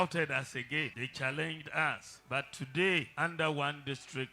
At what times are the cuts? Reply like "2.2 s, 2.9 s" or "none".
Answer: 1.0 s, 2.1 s, 3.1 s